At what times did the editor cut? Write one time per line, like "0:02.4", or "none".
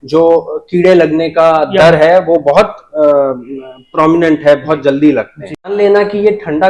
0:05.8